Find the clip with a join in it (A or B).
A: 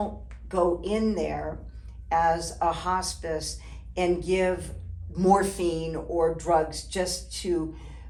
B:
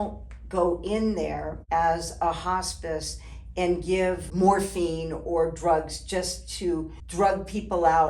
B